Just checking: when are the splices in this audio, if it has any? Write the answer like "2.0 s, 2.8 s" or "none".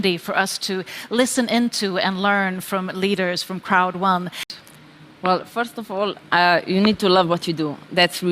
4.4 s